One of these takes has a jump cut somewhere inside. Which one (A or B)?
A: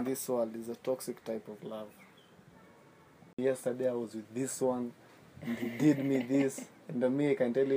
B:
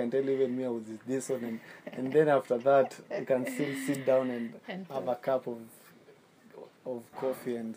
A